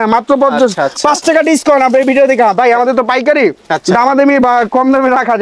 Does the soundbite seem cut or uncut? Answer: uncut